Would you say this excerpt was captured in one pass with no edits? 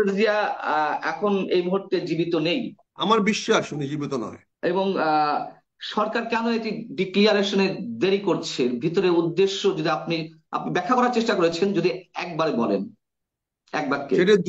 no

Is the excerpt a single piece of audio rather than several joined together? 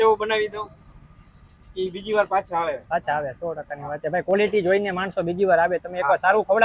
yes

